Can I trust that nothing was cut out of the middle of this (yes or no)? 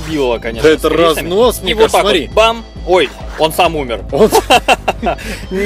yes